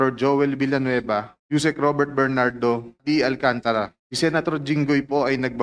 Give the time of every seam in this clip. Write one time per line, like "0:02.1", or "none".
0:01.3
0:02.9
0:04.0